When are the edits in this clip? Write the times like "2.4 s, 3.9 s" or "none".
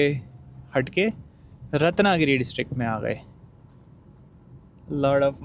none

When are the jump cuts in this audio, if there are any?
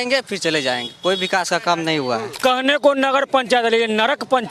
2.4 s

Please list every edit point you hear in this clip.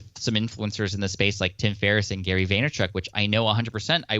none

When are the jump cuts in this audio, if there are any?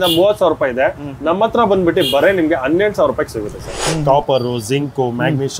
3.7 s

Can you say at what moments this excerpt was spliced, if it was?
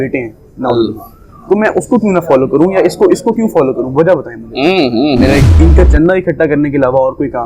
5.5 s

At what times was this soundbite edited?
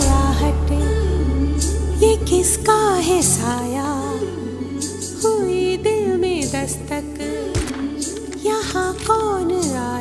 4.5 s

